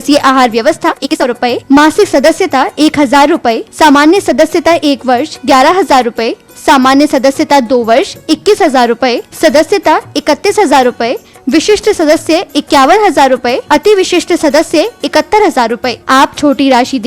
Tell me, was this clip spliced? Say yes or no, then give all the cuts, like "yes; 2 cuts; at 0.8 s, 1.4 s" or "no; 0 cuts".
yes; 1 cut; at 1.3 s